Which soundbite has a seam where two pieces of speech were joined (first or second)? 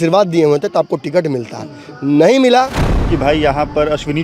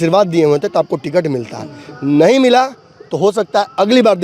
first